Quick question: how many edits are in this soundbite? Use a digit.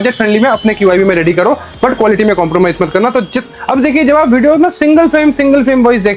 1